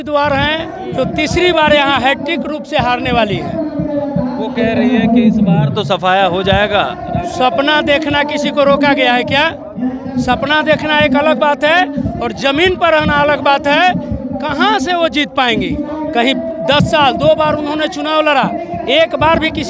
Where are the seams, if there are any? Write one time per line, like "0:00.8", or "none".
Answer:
none